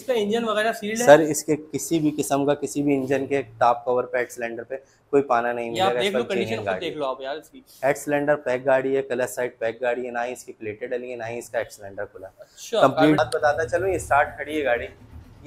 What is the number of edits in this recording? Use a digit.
1